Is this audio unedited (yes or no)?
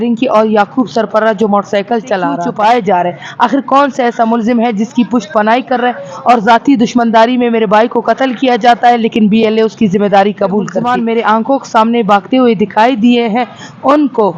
no